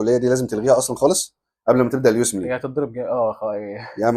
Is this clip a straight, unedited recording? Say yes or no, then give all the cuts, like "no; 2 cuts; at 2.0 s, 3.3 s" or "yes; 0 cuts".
yes; 0 cuts